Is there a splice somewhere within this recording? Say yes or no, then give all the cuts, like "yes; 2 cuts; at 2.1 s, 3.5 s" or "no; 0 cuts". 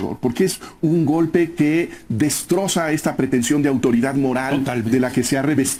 no; 0 cuts